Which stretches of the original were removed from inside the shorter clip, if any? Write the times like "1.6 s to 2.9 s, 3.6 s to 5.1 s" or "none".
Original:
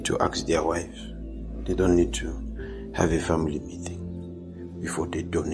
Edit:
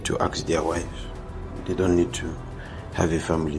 none

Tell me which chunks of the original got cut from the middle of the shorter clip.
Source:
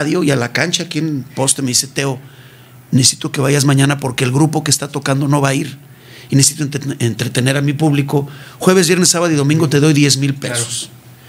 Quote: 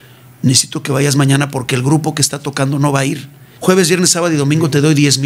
5.9 s to 8.4 s

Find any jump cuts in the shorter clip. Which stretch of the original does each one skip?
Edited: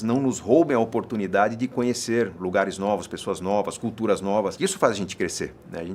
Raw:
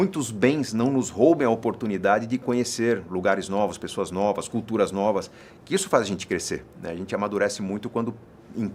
5.3 s to 5.7 s

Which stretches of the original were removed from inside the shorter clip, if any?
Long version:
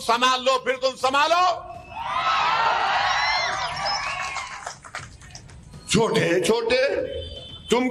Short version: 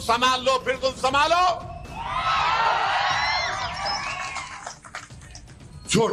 none

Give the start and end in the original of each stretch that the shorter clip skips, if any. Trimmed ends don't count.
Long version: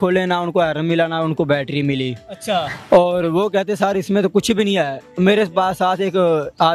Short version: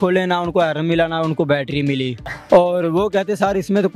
2.3 s to 2.7 s

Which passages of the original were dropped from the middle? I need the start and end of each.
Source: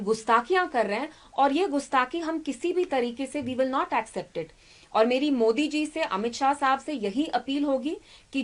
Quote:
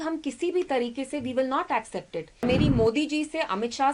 4.7 s to 5.1 s

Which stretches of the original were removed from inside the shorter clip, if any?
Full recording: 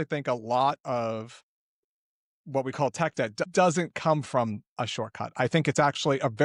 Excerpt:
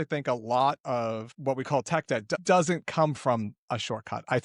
1.3 s to 2.4 s

